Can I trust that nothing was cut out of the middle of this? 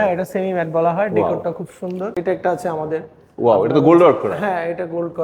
no; 1 cut; at 2.2 s

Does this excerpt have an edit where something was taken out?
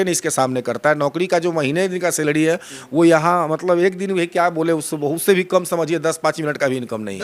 no; 0 cuts

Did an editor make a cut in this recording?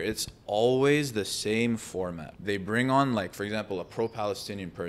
yes; 1 cut; at 2.3 s

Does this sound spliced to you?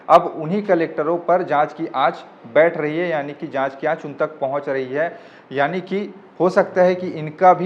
no; 0 cuts

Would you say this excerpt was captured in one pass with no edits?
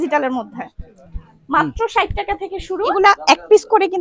no; 1 cut; at 2.9 s

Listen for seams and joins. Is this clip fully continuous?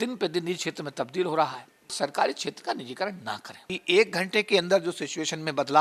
no; 2 cuts; at 1.9 s, 3.7 s

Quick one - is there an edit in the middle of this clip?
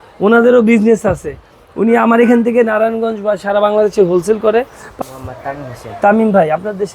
yes; 1 cut; at 5.0 s

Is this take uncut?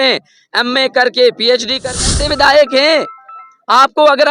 no; 1 cut; at 1.9 s

